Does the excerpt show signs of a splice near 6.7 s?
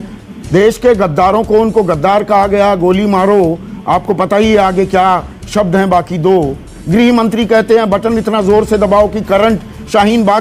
no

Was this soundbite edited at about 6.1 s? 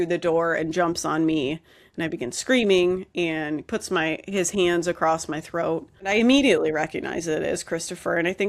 yes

